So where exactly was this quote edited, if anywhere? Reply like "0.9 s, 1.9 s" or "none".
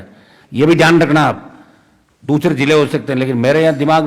none